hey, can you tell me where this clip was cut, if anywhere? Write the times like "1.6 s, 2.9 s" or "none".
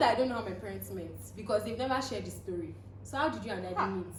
none